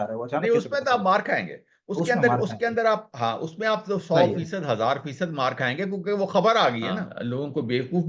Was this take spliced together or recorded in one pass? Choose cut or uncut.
cut